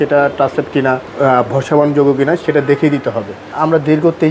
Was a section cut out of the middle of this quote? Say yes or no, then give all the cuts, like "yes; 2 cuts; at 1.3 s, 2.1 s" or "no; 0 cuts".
yes; 2 cuts; at 1.1 s, 3.6 s